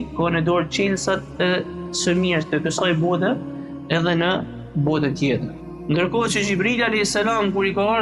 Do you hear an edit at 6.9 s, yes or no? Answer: no